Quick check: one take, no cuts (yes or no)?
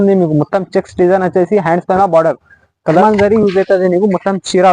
no